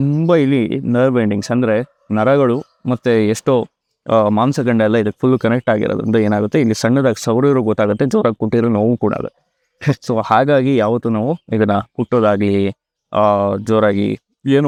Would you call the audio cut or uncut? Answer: uncut